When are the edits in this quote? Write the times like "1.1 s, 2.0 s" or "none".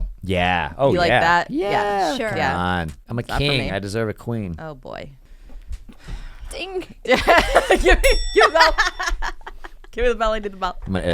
3.0 s, 5.2 s